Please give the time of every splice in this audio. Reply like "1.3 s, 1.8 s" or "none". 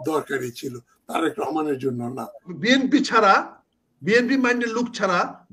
2.5 s